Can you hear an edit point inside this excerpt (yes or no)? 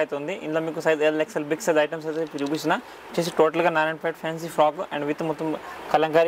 no